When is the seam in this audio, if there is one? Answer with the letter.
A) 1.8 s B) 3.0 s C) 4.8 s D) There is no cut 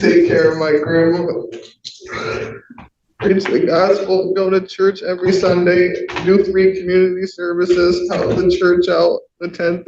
B